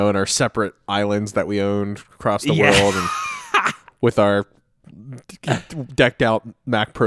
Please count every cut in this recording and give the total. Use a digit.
0